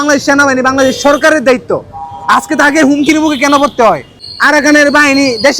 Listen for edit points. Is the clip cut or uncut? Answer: cut